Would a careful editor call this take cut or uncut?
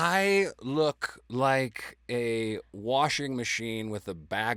uncut